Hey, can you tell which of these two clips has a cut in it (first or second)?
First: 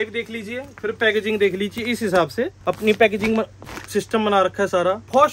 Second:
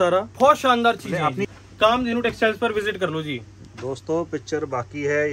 second